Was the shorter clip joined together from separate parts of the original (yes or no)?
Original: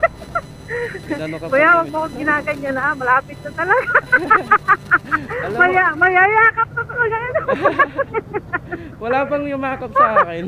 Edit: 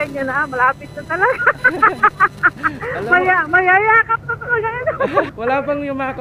yes